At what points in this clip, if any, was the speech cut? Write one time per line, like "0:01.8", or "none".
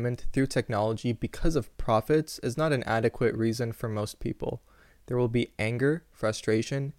none